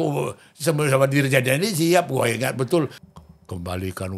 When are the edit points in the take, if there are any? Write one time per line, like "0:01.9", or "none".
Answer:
0:03.0